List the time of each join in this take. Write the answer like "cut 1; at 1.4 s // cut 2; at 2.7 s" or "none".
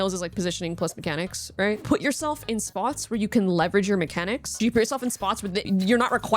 cut 1; at 1.8 s // cut 2; at 4.5 s // cut 3; at 5.6 s